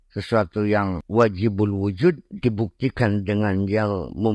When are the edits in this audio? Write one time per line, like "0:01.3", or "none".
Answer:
0:01.0